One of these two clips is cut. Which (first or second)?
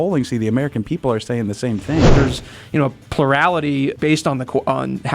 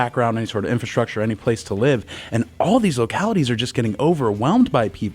first